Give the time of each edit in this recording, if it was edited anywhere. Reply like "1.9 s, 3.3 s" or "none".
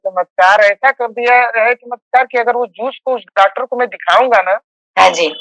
none